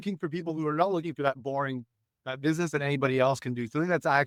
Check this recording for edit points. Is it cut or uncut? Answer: uncut